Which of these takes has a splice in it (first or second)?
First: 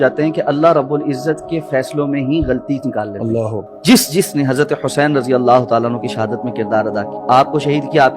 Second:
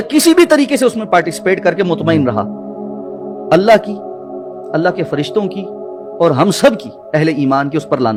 first